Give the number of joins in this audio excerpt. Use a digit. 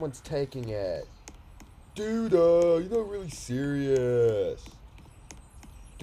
0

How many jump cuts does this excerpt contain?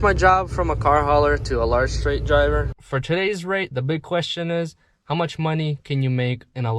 1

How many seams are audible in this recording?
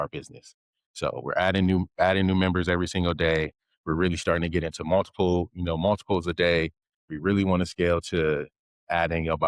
0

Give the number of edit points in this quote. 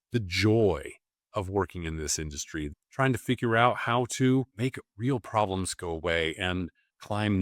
1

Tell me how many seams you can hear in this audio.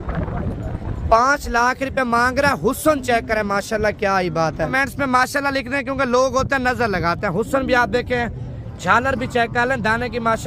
1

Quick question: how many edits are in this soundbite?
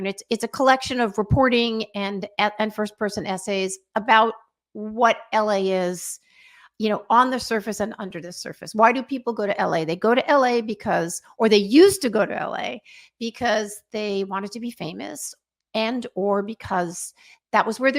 0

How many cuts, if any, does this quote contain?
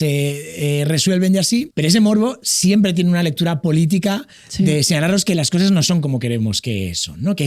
1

